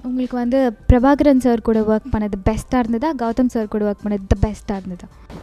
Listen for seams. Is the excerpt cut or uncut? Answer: uncut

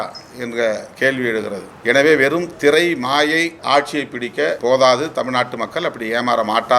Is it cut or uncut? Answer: cut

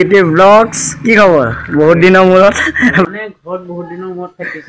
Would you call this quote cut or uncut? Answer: cut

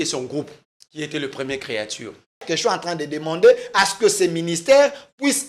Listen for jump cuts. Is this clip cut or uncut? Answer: cut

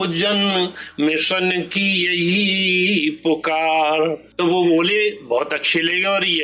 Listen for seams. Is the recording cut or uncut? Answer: cut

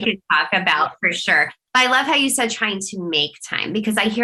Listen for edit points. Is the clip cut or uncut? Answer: uncut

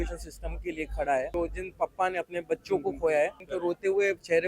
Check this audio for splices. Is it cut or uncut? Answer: cut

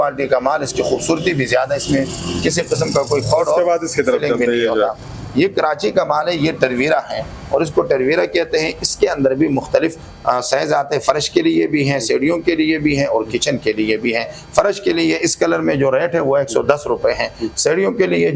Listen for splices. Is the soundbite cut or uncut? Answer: uncut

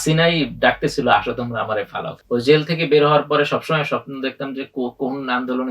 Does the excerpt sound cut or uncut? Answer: cut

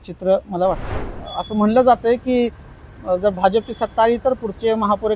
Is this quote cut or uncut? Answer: cut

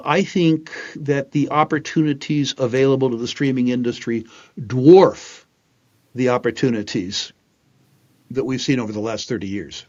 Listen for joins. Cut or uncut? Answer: uncut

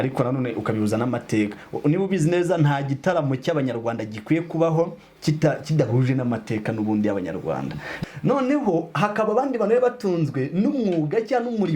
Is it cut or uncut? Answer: cut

